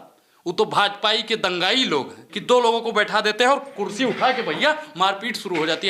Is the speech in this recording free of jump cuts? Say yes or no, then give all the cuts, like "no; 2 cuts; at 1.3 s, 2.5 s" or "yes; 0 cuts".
no; 1 cut; at 2.3 s